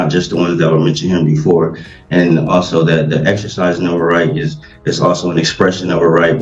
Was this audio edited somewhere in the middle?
no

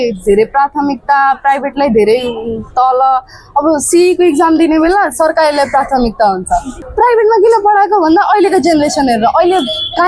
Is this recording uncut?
no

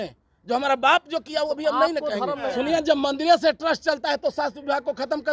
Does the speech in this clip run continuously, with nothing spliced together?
no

